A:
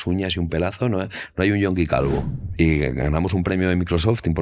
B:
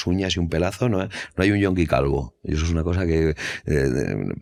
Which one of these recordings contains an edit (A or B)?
A